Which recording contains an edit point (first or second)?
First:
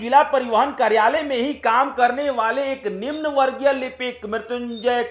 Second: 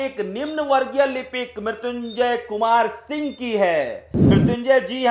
second